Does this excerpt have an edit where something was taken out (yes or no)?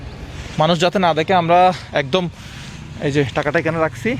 no